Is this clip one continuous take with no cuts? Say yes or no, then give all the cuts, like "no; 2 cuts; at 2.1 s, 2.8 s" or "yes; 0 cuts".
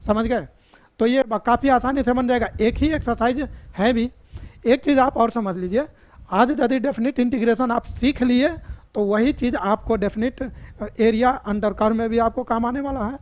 yes; 0 cuts